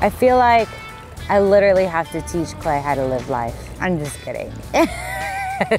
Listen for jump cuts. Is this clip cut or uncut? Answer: cut